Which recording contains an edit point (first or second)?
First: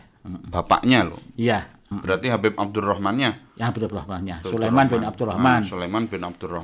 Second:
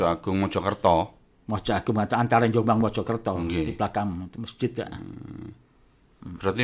first